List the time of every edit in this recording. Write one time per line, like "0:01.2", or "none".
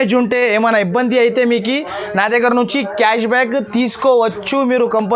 none